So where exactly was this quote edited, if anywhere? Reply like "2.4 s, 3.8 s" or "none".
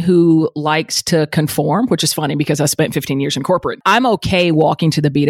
3.8 s